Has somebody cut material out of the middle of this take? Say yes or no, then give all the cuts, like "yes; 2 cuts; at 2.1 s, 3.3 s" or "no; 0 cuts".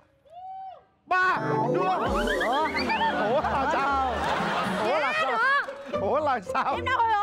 no; 0 cuts